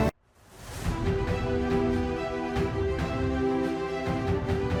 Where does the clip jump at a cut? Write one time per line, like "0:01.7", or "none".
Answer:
none